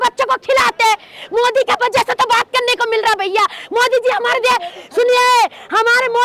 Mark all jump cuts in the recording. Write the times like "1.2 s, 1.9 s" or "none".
none